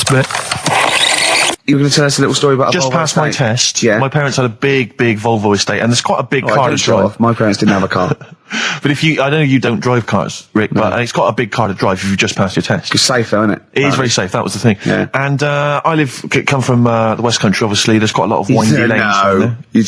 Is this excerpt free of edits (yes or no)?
no